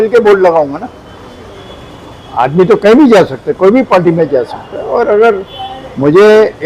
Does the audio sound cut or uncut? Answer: uncut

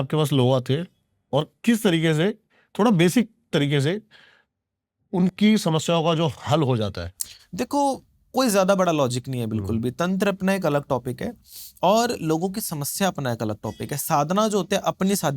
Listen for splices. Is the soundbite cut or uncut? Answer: uncut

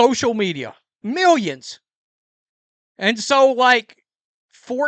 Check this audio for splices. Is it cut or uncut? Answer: cut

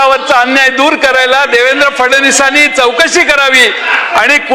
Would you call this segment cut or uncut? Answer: uncut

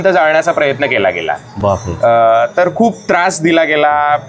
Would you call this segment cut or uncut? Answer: uncut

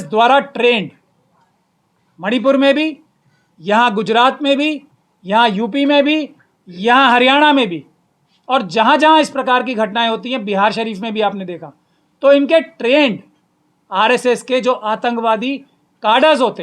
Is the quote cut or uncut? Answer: uncut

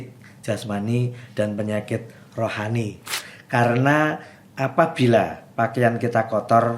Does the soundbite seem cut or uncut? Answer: cut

